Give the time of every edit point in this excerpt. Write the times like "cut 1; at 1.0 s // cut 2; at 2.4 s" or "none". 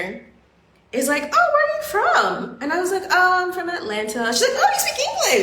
none